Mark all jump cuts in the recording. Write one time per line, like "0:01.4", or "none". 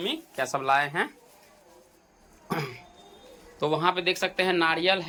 none